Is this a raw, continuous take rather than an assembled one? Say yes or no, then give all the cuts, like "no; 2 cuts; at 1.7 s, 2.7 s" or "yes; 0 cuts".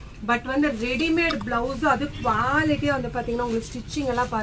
yes; 0 cuts